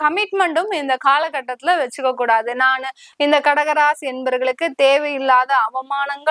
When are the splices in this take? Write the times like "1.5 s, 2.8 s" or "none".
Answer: 3.0 s

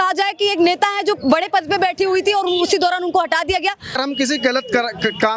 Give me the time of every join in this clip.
3.9 s

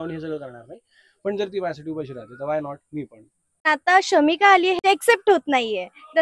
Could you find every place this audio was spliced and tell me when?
3.7 s, 4.8 s

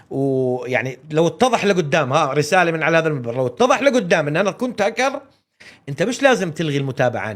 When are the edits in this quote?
none

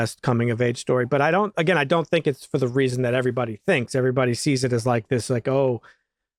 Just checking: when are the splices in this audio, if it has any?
none

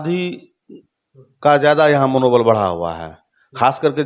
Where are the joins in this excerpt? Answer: none

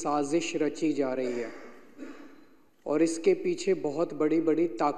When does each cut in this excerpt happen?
none

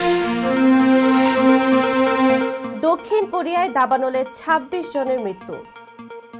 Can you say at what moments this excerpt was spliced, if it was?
none

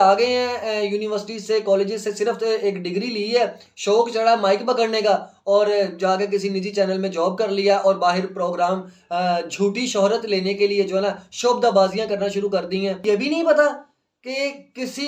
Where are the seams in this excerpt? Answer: 13.0 s

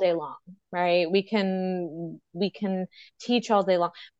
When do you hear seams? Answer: none

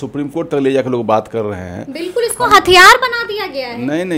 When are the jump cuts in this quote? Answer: none

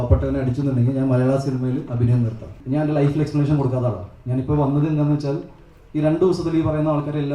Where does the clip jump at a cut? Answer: 2.6 s

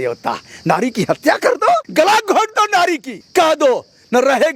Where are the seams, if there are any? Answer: 1.9 s, 3.1 s

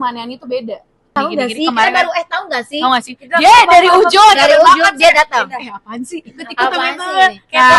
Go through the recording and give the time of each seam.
1.1 s

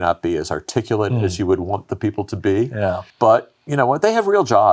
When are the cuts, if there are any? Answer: 3.1 s

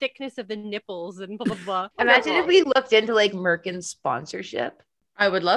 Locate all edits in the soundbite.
1.9 s

